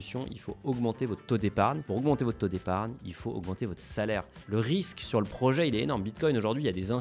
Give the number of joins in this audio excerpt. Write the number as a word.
two